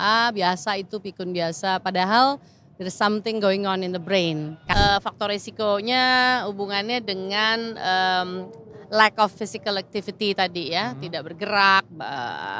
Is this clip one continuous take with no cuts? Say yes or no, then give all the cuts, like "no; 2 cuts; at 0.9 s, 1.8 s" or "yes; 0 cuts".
no; 1 cut; at 4.6 s